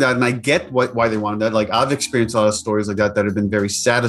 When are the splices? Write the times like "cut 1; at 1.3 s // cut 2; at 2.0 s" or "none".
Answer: none